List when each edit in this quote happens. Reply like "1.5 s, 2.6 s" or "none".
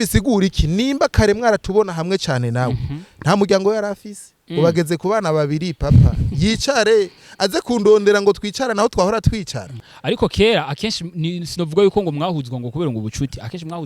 9.9 s